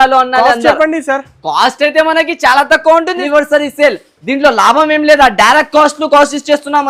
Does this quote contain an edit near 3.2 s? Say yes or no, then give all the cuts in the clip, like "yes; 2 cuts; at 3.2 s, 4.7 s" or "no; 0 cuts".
yes; 1 cut; at 3.2 s